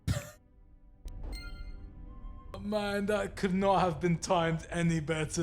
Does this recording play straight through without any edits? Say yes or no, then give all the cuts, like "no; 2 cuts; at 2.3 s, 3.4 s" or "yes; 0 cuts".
no; 1 cut; at 2.5 s